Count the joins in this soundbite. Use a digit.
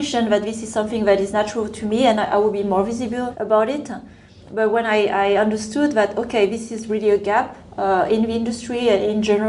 2